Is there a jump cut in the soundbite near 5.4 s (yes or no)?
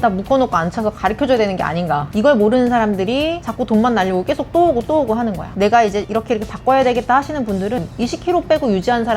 yes